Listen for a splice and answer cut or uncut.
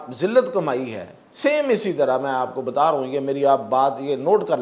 uncut